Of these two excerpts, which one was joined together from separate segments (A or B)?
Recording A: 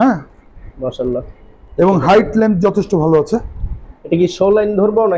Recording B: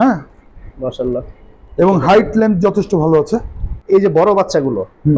B